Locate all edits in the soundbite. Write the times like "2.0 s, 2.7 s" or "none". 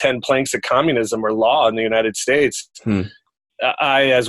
none